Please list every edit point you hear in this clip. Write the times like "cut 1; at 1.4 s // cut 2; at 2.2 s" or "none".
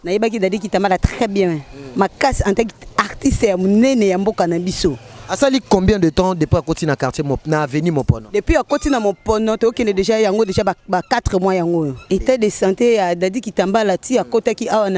cut 1; at 12.0 s